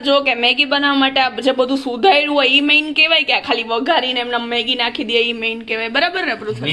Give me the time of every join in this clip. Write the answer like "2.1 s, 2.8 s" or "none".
none